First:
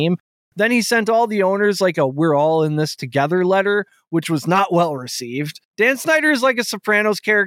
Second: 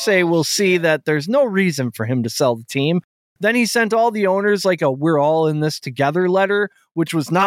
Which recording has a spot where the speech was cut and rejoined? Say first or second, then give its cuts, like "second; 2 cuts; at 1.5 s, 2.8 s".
first; 1 cut; at 5.6 s